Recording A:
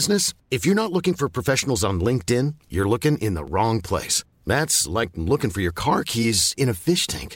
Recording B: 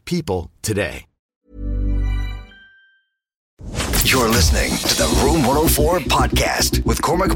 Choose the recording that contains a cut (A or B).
B